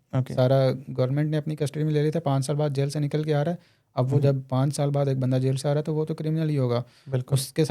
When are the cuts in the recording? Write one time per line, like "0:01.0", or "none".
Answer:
none